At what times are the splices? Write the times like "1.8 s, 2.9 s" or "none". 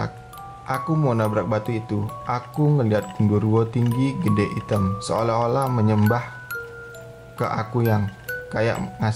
none